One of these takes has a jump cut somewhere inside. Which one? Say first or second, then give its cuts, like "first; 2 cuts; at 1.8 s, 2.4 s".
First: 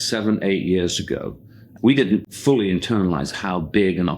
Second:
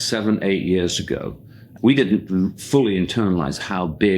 first; 1 cut; at 2.3 s